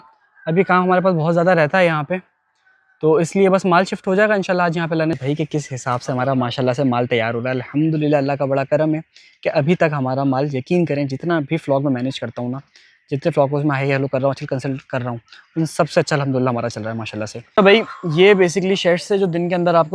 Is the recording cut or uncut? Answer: cut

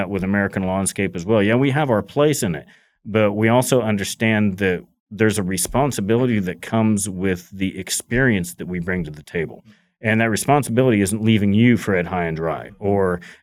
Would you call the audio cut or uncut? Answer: uncut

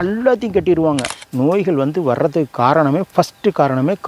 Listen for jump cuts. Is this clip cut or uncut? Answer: cut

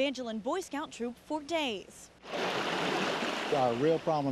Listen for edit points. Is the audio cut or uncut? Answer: uncut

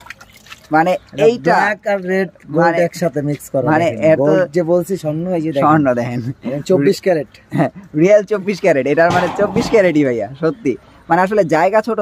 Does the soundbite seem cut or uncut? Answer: uncut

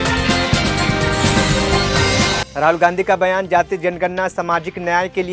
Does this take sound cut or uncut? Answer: cut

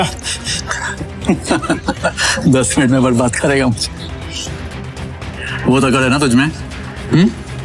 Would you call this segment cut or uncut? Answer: uncut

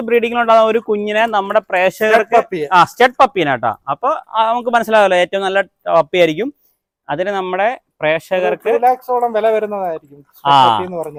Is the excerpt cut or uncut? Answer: uncut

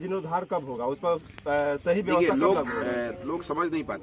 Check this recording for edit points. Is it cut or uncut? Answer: uncut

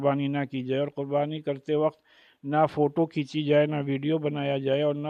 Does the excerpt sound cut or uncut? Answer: uncut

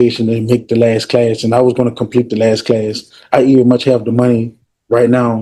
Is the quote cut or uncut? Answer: uncut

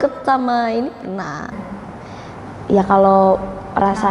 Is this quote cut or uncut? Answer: cut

